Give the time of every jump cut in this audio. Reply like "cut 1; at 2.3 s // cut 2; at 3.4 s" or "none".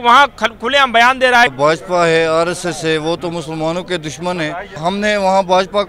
cut 1; at 1.5 s // cut 2; at 4.8 s